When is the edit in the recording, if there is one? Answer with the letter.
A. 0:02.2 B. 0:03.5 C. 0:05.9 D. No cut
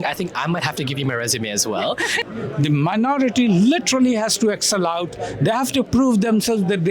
A